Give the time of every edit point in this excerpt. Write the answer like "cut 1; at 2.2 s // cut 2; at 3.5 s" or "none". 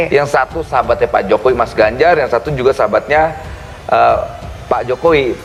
none